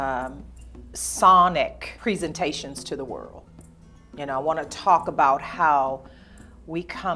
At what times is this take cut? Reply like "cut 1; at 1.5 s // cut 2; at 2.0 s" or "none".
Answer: cut 1; at 1.9 s